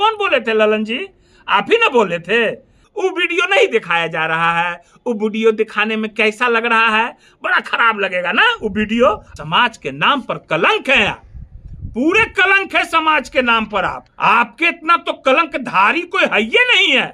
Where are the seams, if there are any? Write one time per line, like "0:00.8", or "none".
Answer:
0:02.8
0:09.3
0:14.1